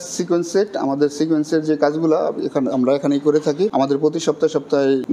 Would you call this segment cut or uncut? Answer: uncut